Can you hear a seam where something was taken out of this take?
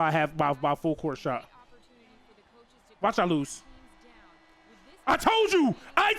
no; 0 cuts

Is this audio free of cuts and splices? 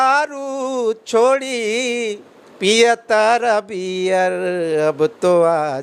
yes; 0 cuts

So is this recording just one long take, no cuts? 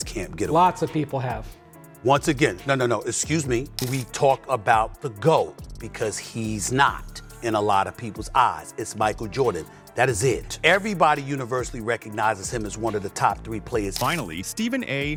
yes; 0 cuts

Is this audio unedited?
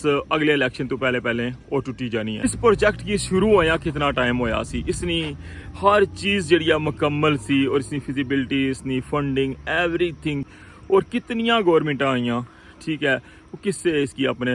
no; 2 cuts; at 2.4 s, 10.5 s

